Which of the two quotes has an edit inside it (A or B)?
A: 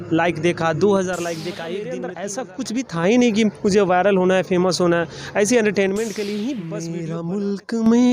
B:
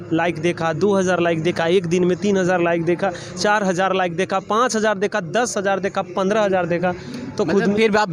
A